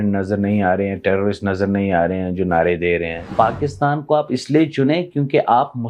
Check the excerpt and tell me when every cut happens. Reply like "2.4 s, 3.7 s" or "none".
3.3 s

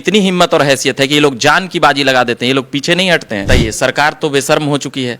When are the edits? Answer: 3.5 s

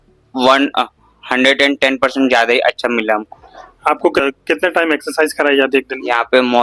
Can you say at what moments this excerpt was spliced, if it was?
4.2 s

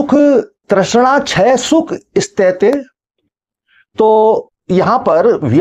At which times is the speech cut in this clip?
none

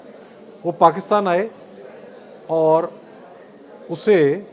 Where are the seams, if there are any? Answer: none

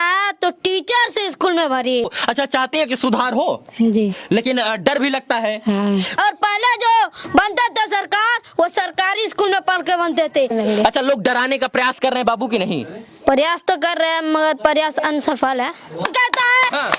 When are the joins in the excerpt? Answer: 2.1 s, 6.2 s, 10.5 s, 16.0 s

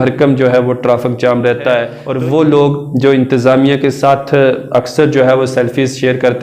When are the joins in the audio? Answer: 2.0 s

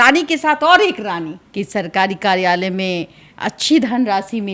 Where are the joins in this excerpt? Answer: 1.4 s

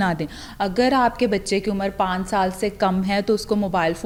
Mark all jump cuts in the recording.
none

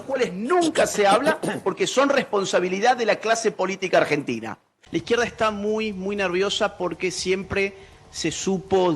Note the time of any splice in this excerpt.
4.8 s

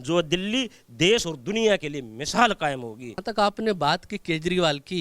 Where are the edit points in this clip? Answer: 3.1 s

